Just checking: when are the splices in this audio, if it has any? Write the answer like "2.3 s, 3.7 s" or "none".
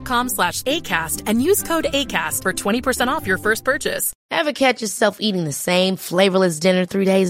4.1 s